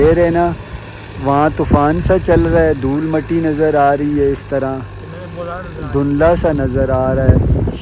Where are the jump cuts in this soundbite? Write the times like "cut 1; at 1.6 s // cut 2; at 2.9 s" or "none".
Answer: none